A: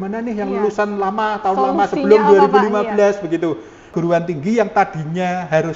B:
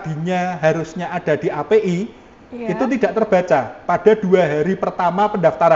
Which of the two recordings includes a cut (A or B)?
A